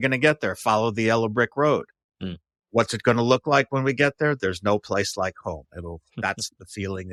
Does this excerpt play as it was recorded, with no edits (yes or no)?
yes